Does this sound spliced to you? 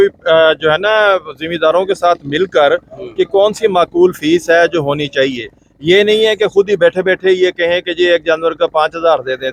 no; 0 cuts

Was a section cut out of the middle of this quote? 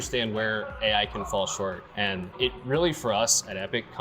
yes; 1 cut; at 2.3 s

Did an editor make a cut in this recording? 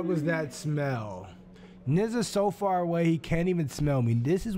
no; 0 cuts

